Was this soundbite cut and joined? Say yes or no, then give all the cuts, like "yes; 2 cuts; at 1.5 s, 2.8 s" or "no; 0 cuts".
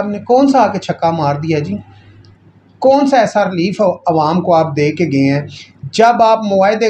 no; 0 cuts